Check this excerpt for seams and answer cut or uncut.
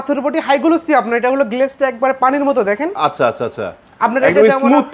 uncut